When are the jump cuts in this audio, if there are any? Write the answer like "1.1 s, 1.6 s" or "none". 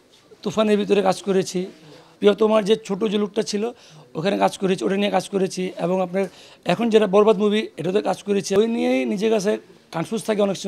2.1 s, 8.6 s